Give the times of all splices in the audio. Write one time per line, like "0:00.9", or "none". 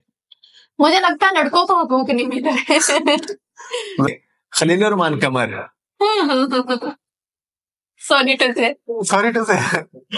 0:04.1